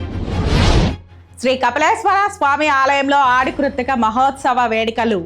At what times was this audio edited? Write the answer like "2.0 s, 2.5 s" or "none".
1.1 s